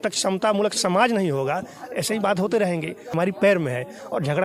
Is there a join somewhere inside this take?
yes; 1 cut; at 3.1 s

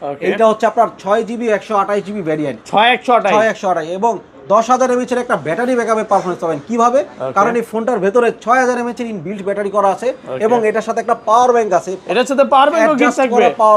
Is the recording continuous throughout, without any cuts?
yes; 0 cuts

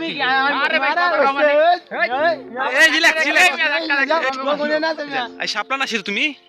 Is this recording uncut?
no; 1 cut; at 4.2 s

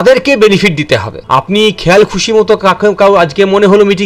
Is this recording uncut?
no; 1 cut; at 1.1 s

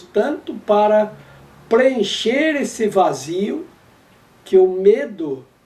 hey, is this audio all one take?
yes; 0 cuts

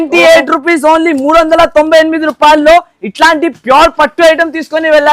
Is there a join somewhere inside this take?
no; 0 cuts

